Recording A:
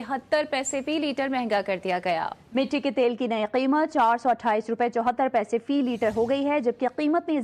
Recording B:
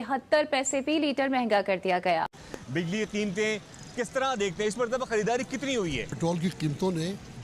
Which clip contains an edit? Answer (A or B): B